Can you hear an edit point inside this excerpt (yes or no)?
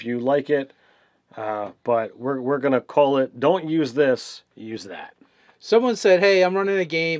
yes